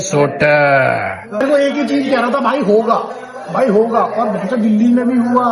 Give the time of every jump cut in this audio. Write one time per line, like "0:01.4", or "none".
0:01.4